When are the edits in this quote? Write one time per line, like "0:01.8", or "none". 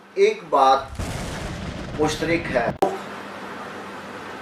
0:02.8

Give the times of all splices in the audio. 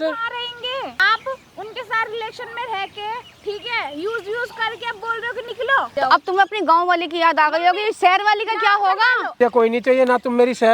0:01.0
0:06.0
0:09.4

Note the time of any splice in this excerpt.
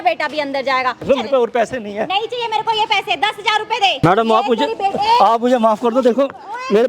0:01.0
0:04.0

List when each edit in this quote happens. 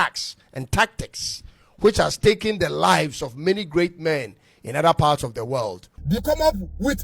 0:06.1

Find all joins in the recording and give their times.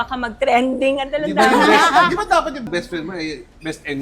0:02.7

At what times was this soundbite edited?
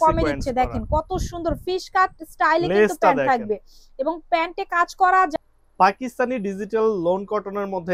0:05.3

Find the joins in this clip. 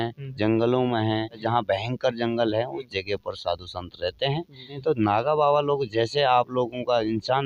0:01.4
0:04.8

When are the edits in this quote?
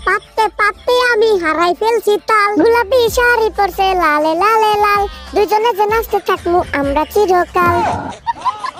none

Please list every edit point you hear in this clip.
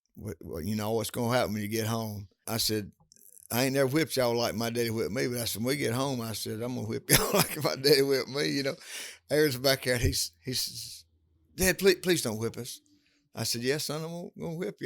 0:02.4

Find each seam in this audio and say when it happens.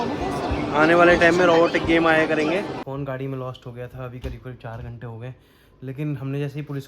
0:02.8

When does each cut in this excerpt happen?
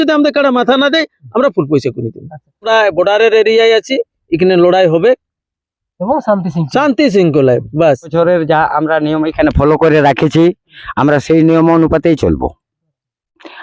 0:02.6
0:08.1

